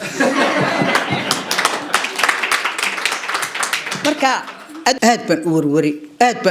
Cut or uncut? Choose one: cut